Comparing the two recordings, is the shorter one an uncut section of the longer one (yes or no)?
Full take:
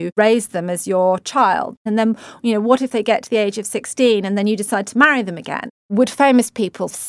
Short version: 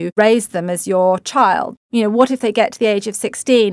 no